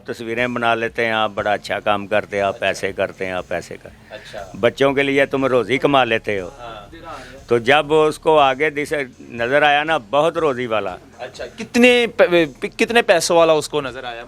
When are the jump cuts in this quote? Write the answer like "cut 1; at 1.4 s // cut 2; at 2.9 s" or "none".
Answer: none